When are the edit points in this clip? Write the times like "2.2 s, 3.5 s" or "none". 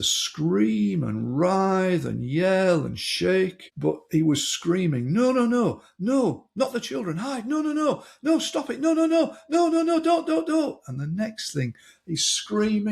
3.6 s